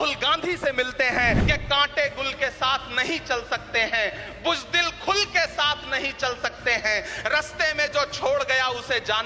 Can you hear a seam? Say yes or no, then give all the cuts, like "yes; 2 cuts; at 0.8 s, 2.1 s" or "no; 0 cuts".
yes; 1 cut; at 1.4 s